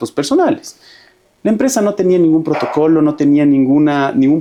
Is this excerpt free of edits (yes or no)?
yes